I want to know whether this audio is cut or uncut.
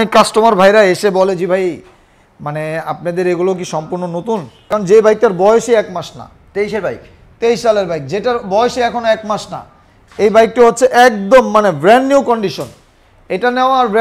cut